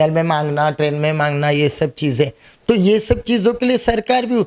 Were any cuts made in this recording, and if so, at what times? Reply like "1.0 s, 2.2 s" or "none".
none